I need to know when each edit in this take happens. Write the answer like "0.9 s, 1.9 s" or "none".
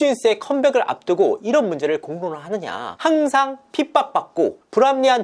2.9 s

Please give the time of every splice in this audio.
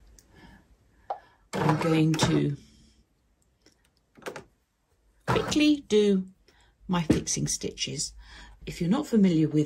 8.6 s

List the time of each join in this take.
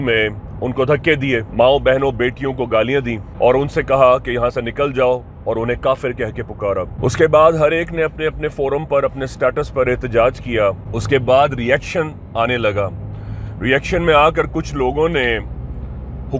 1.5 s, 3.3 s, 6.9 s, 10.9 s

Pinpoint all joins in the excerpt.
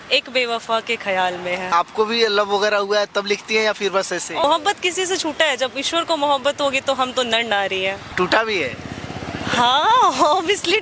1.7 s, 4.4 s, 8.1 s

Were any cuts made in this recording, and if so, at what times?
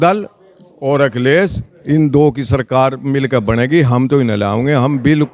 none

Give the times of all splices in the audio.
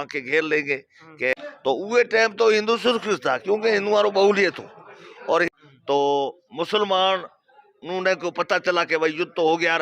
1.3 s, 5.5 s

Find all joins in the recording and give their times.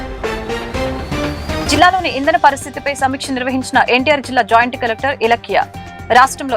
1.6 s

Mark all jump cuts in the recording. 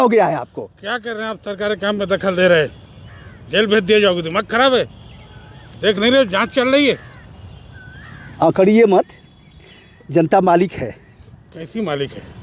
none

